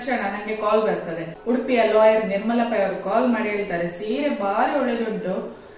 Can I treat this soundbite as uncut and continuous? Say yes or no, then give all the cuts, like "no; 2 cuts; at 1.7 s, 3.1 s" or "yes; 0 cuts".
no; 1 cut; at 1.3 s